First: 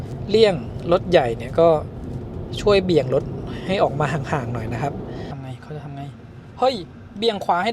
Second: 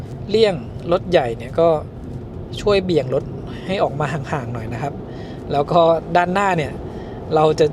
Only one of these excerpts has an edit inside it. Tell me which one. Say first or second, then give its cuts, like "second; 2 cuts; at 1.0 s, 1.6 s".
first; 1 cut; at 5.3 s